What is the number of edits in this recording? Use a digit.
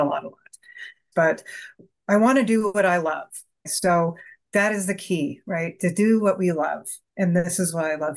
2